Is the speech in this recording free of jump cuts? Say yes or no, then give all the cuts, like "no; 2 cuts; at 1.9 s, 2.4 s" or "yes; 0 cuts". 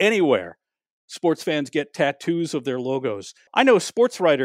no; 1 cut; at 3.5 s